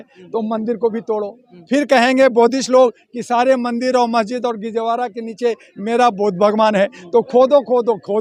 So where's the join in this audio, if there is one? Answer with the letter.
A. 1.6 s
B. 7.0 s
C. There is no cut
C